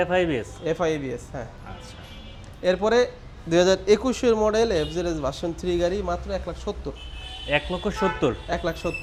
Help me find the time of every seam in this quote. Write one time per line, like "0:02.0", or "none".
none